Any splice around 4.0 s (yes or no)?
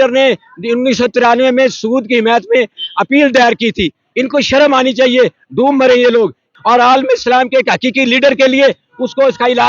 no